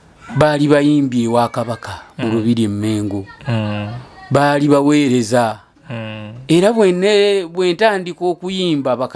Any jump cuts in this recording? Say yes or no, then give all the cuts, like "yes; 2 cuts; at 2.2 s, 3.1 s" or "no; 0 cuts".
no; 0 cuts